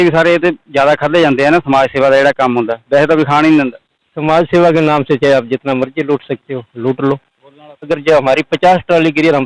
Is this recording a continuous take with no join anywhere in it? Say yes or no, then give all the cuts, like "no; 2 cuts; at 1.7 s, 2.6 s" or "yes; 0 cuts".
no; 1 cut; at 7.9 s